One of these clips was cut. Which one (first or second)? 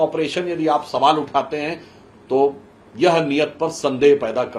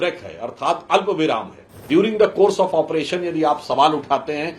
second